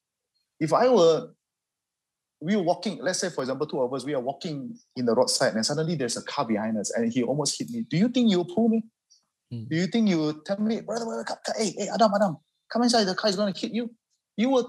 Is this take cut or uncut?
uncut